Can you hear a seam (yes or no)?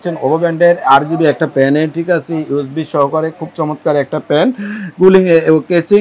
no